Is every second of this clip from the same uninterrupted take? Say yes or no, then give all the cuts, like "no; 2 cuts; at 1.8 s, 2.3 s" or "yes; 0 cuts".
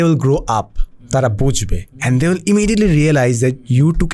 yes; 0 cuts